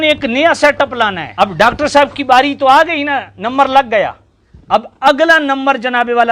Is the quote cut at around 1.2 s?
yes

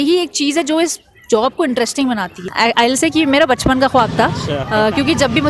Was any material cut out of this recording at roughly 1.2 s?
no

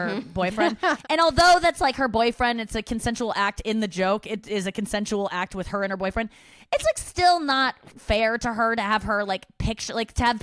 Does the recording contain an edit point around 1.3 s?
no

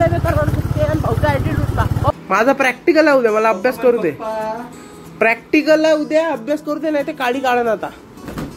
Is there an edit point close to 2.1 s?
yes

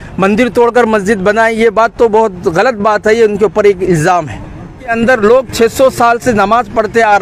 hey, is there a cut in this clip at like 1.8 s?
no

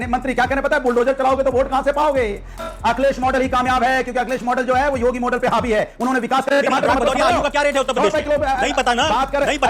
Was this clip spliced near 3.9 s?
no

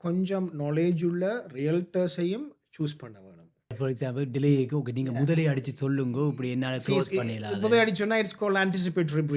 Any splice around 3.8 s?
yes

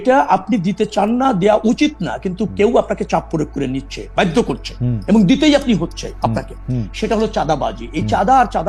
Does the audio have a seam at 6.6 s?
no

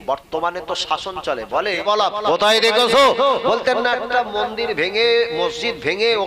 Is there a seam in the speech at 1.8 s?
yes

